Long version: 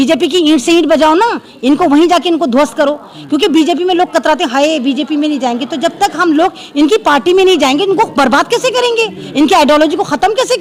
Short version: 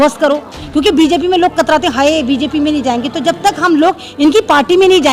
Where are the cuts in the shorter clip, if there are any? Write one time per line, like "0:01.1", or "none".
none